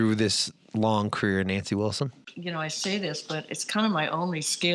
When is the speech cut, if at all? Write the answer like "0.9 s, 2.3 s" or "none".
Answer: 2.2 s

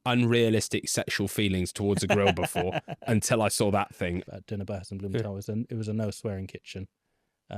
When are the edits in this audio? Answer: 4.2 s

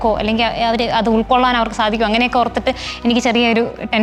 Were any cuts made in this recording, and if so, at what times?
none

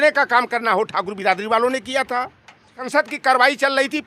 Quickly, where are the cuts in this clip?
2.8 s

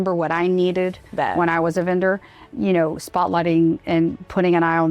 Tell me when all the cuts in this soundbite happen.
1.0 s, 2.5 s

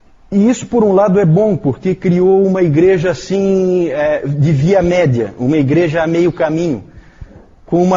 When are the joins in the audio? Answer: 6.3 s

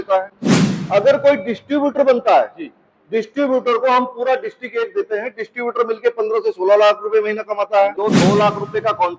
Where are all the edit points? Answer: 7.9 s

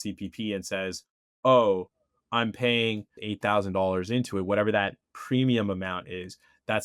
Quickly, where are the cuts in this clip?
3.2 s

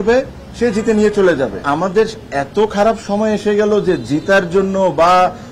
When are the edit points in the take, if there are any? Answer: 1.7 s

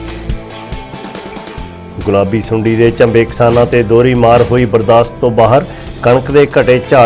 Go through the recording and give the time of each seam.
none

